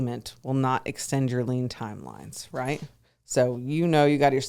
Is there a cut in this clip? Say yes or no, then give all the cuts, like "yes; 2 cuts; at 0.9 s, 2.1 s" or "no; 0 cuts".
no; 0 cuts